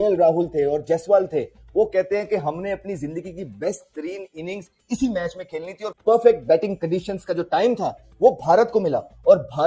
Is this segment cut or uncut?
uncut